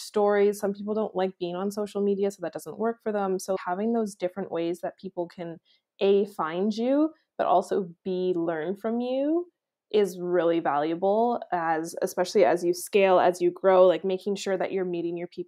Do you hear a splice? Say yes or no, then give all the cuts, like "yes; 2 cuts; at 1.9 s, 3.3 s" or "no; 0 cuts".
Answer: yes; 1 cut; at 3.6 s